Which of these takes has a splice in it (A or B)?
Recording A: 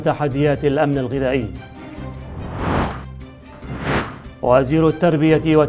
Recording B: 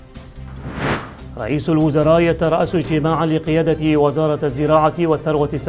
B